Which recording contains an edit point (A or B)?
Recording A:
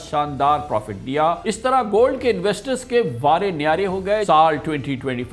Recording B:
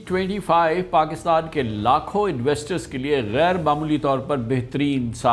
A